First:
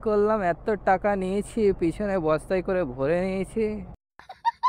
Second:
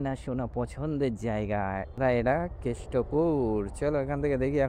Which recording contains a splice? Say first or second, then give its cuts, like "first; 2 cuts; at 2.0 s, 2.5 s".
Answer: second; 1 cut; at 2.0 s